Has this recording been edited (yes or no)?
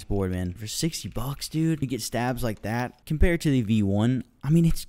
yes